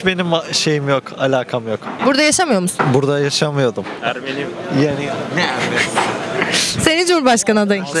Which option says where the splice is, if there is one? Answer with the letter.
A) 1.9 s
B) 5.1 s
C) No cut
C